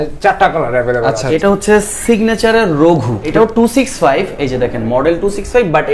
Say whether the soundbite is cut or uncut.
cut